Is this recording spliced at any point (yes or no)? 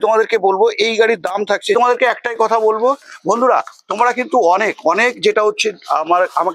yes